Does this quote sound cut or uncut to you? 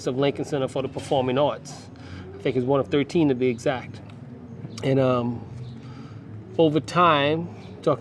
uncut